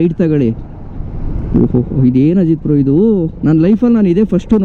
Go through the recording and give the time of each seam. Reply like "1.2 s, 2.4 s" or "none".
none